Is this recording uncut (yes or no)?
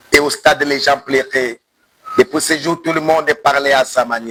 yes